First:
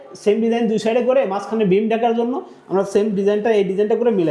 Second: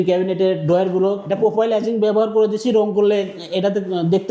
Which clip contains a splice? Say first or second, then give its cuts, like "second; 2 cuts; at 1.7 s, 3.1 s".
second; 1 cut; at 1.2 s